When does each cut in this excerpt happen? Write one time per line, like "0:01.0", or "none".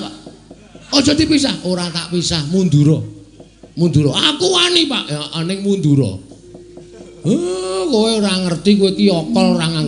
none